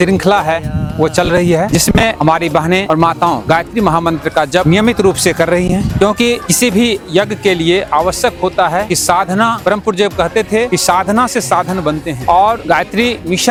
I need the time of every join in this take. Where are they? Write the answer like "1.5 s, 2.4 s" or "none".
none